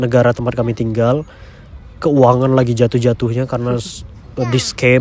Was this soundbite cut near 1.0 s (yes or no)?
no